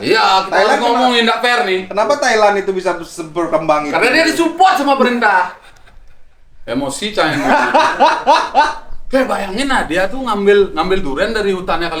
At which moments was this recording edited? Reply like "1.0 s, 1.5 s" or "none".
none